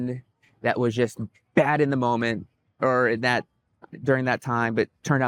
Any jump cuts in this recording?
no; 0 cuts

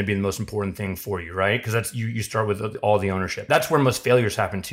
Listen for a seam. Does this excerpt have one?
yes; 1 cut; at 3.4 s

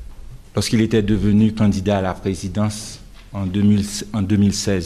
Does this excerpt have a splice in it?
yes; 1 cut; at 3.8 s

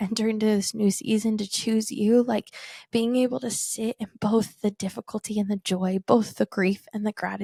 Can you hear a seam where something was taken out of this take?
no; 0 cuts

